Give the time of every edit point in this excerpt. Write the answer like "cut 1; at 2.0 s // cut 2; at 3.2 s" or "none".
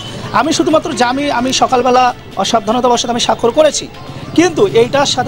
none